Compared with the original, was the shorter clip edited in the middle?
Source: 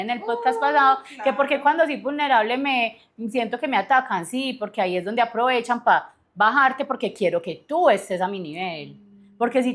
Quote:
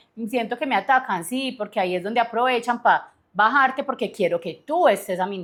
no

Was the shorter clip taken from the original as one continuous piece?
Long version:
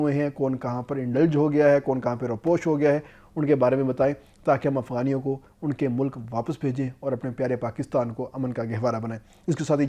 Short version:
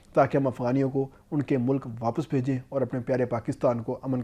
yes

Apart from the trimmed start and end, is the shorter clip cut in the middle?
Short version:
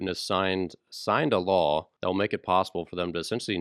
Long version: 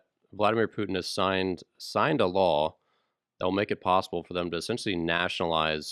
yes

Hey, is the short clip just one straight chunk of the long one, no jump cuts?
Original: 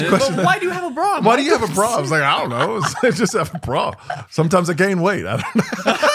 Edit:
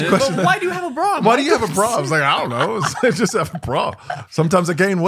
yes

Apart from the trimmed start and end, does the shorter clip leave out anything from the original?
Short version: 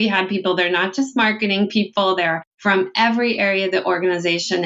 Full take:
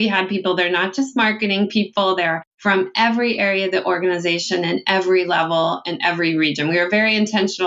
no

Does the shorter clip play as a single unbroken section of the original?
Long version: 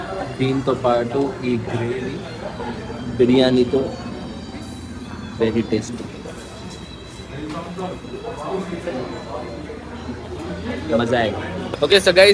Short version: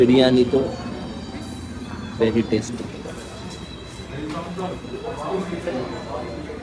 yes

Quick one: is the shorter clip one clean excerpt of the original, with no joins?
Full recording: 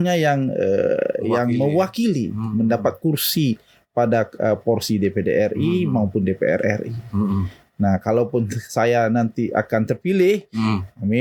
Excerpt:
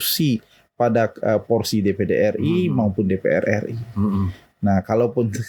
yes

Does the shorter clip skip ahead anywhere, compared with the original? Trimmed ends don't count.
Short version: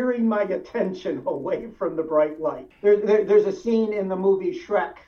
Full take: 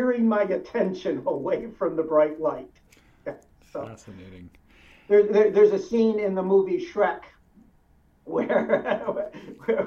yes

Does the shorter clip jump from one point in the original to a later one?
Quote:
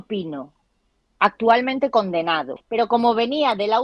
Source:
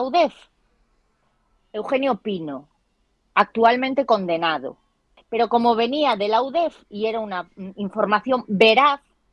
yes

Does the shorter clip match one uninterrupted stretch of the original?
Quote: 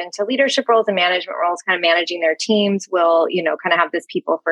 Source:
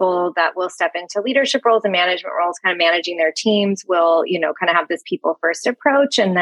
yes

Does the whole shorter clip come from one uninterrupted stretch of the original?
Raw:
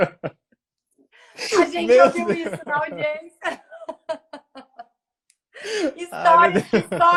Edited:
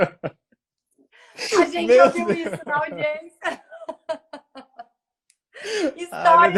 yes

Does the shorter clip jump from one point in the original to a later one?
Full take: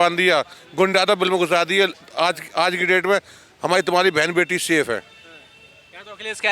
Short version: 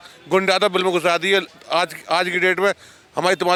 no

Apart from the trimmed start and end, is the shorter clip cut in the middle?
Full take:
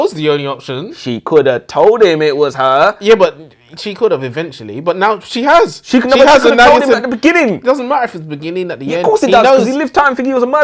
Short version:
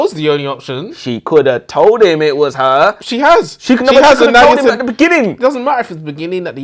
yes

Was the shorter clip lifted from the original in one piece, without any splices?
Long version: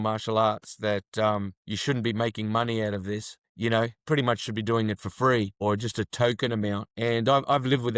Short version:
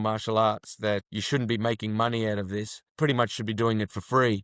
no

